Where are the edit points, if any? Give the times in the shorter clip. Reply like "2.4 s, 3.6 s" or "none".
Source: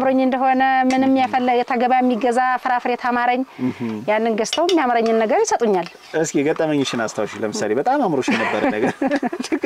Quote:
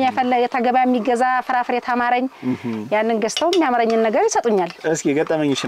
4.8 s